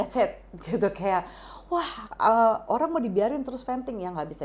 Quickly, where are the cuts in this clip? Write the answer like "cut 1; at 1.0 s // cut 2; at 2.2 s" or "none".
none